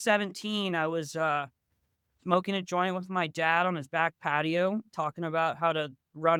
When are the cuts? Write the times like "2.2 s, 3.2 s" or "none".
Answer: none